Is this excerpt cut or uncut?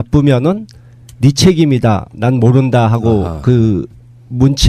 uncut